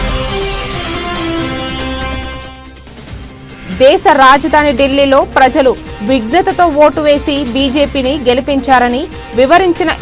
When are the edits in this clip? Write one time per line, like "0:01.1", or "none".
0:01.0